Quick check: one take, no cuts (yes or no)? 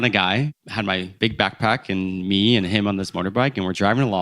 no